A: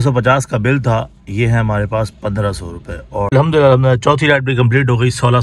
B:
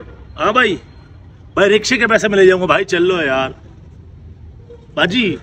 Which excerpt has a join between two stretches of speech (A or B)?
A